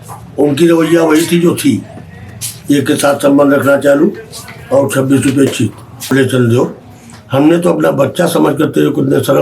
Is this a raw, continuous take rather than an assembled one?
no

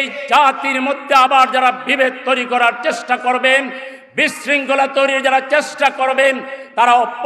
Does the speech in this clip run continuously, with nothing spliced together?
yes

